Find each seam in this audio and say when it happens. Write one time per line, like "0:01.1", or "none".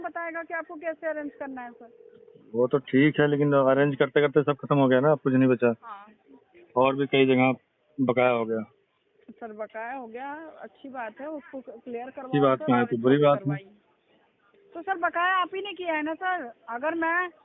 none